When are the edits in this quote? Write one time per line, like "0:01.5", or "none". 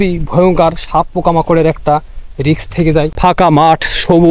0:03.1